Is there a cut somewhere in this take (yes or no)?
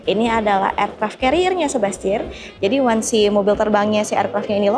no